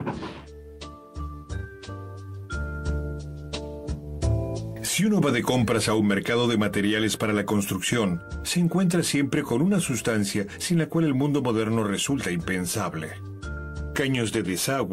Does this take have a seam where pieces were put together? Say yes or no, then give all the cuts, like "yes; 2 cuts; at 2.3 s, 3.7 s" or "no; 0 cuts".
no; 0 cuts